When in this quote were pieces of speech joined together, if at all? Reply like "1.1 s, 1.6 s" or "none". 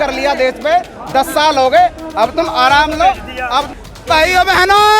3.7 s